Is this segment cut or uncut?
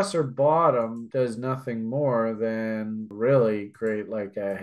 cut